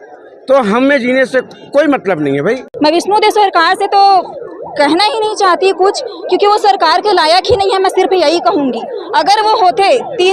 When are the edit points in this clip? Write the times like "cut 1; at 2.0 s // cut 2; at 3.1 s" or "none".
cut 1; at 2.7 s